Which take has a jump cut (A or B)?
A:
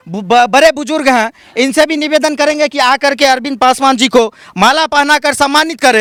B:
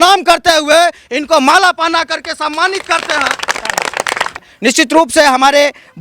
B